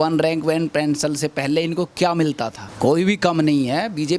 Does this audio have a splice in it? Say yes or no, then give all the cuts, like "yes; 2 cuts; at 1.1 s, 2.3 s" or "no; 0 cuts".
yes; 1 cut; at 2.6 s